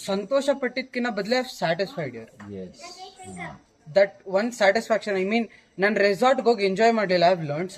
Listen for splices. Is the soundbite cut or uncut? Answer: uncut